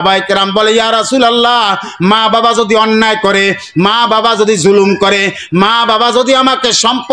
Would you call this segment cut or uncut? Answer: uncut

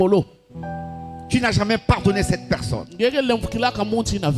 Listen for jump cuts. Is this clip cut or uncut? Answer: uncut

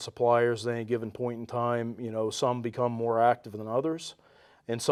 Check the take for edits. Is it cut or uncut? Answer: uncut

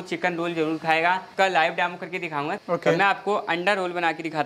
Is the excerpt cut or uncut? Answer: cut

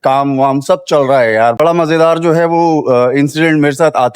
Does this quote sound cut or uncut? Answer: cut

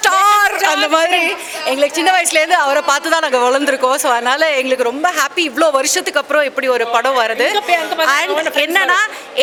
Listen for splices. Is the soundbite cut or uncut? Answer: uncut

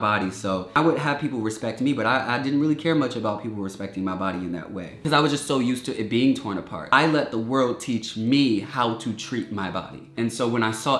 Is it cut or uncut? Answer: cut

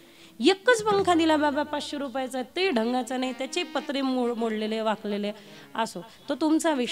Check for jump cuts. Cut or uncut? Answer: uncut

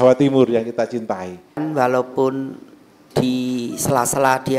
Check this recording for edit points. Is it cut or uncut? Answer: cut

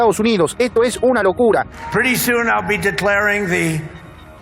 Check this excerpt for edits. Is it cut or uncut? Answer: cut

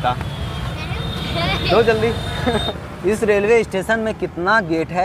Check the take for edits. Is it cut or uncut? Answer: cut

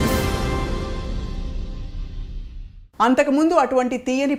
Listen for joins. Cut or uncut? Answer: uncut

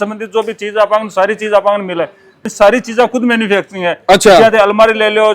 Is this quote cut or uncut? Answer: cut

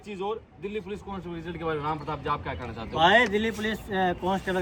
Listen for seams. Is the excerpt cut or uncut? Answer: uncut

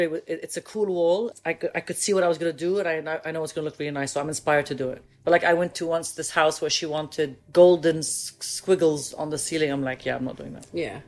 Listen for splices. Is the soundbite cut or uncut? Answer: cut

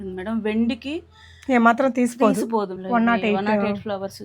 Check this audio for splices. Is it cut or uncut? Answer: cut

